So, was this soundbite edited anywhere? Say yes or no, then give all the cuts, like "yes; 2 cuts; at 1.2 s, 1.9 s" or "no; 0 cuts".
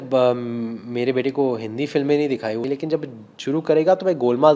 yes; 1 cut; at 2.7 s